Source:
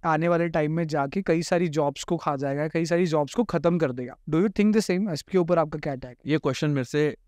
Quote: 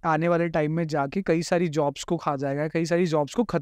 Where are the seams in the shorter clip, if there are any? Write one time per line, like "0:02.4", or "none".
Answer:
none